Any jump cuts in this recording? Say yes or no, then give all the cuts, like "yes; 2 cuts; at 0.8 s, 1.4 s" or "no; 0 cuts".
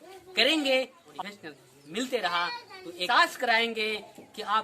yes; 2 cuts; at 1.0 s, 3.0 s